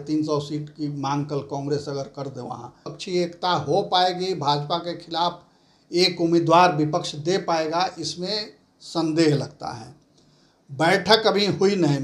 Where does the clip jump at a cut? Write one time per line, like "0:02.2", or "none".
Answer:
0:02.9